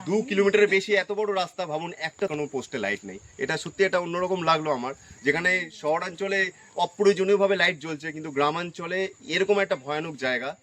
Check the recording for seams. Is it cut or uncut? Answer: cut